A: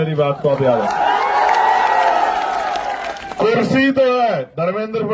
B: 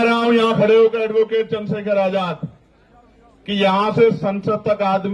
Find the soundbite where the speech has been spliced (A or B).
A